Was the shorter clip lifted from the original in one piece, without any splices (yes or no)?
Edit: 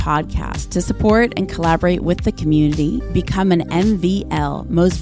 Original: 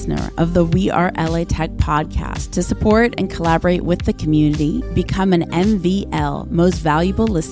yes